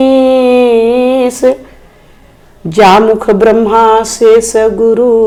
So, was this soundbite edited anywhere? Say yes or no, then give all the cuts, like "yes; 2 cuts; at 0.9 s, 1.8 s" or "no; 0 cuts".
no; 0 cuts